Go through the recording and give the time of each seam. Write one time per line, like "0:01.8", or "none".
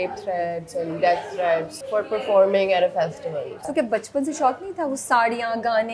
0:01.8
0:03.6